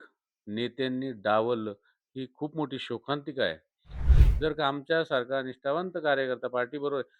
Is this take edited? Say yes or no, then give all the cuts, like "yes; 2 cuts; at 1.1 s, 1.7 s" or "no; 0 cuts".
yes; 1 cut; at 4.1 s